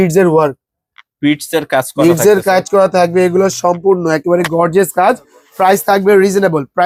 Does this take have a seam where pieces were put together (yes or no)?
no